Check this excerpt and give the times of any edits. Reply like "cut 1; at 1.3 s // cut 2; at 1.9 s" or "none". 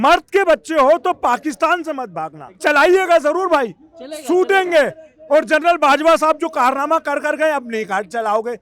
cut 1; at 2.6 s